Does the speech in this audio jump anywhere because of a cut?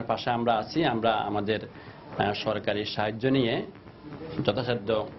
no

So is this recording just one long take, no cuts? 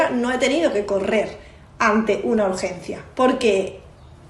yes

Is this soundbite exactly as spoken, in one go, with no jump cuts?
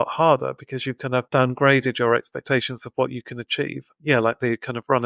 no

